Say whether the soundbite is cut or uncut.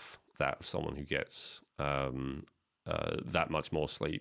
uncut